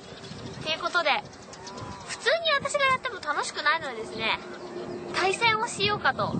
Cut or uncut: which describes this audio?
uncut